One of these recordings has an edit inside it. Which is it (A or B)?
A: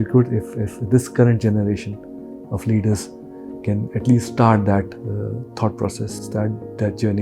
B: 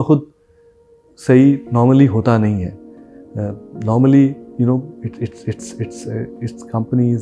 A